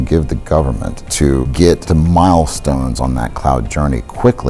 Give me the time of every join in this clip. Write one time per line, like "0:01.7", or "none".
none